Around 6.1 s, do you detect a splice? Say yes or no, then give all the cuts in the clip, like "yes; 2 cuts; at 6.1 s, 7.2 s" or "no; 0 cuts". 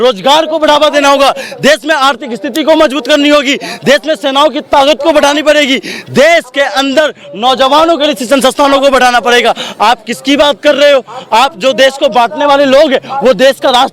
no; 0 cuts